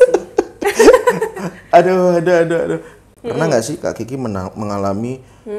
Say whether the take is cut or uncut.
uncut